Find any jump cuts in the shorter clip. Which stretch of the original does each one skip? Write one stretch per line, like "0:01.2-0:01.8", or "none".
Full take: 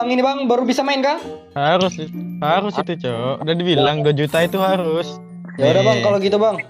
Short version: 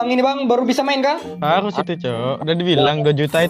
0:01.3-0:02.3

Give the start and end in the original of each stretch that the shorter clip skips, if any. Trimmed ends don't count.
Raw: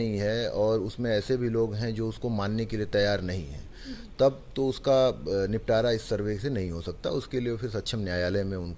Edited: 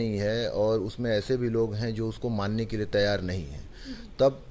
none

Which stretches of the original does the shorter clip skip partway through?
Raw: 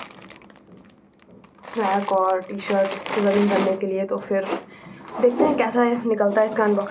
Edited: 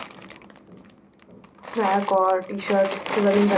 none

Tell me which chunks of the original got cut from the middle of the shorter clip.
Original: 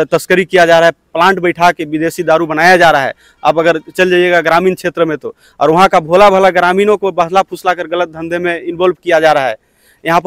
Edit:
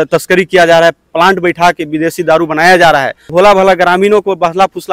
0:03.3-0:06.1

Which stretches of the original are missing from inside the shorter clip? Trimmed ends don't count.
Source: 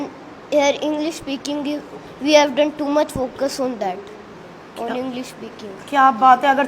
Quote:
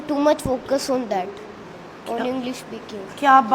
none

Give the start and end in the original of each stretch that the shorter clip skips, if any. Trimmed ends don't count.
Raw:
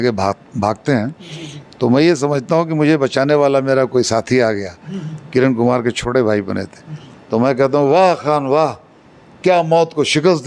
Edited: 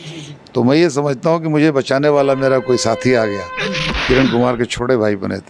none

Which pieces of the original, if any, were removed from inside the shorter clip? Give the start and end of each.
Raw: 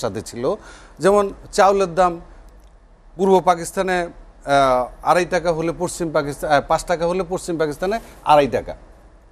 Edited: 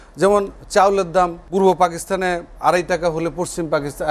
0:02.2-0:03.1
0:04.2-0:04.9

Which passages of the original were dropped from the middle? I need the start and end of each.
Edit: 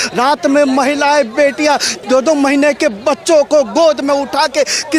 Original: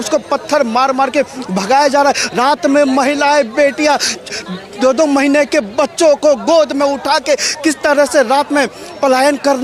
0:04.1-0:04.6

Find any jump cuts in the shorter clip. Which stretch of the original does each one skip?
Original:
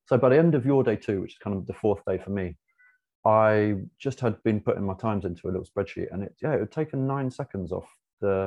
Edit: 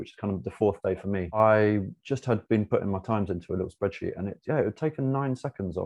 0:02.6-0:03.3

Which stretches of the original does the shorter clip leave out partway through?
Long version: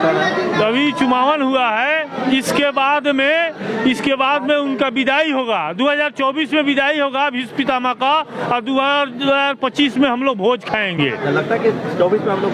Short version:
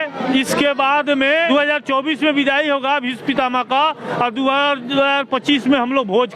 0:03.4-0:05.8

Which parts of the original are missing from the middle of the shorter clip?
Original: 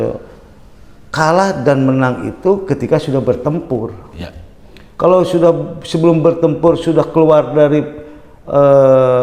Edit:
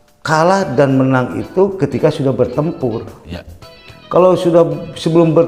none

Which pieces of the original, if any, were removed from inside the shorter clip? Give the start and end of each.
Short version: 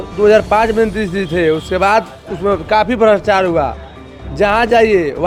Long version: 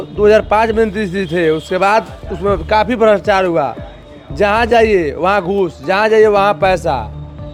none

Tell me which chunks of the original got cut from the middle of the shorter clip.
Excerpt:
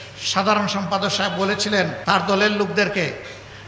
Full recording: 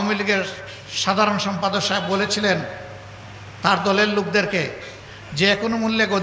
0:02.7-0:03.5

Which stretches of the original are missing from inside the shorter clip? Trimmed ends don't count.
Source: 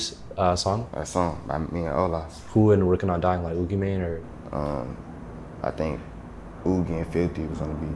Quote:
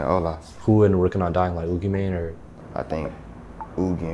0:04.3-0:05.3

